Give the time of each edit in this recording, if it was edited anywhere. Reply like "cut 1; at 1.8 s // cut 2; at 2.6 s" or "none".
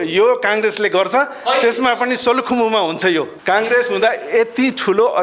cut 1; at 3.3 s